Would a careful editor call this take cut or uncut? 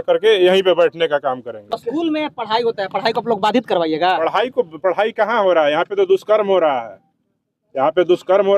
cut